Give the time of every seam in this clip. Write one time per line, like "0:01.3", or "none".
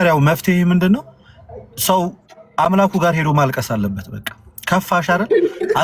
none